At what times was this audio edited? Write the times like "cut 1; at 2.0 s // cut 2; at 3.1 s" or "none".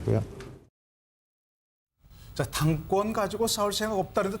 cut 1; at 1.4 s